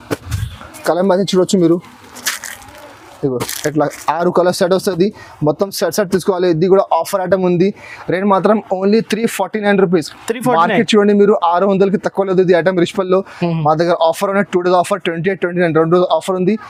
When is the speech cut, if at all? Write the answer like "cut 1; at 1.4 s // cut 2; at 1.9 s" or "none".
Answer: none